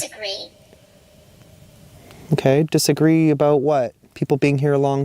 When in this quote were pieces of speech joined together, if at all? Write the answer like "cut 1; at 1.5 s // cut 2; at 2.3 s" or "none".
cut 1; at 4.1 s